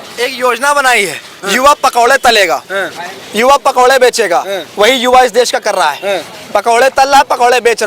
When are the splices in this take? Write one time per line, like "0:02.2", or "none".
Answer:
none